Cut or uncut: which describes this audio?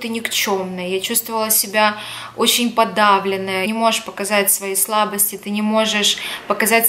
cut